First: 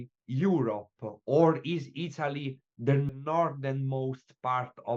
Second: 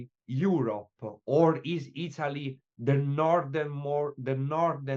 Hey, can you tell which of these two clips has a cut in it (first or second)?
first